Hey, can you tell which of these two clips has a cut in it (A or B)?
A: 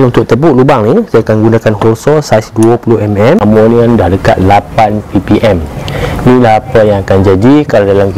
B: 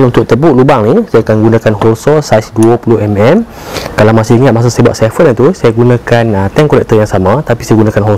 A